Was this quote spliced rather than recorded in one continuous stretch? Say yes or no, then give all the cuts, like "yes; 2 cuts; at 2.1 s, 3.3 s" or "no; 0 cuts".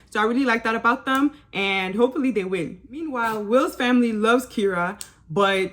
yes; 1 cut; at 3.0 s